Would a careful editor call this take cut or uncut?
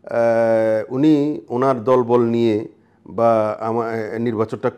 uncut